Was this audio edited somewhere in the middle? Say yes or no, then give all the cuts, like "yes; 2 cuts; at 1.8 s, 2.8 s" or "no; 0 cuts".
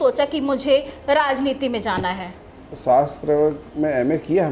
yes; 1 cut; at 2.7 s